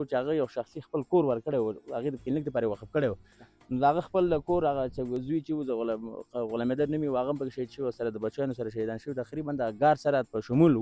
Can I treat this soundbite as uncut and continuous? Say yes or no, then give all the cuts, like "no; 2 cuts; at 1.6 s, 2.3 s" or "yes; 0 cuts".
yes; 0 cuts